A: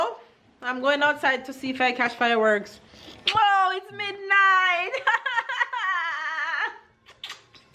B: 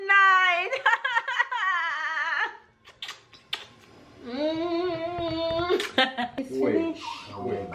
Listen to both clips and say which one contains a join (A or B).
B